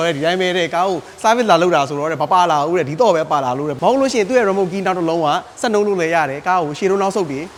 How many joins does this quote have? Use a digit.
0